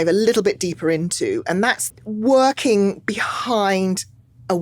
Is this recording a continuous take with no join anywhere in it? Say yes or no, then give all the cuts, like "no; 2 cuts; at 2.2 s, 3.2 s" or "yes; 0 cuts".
no; 1 cut; at 1.8 s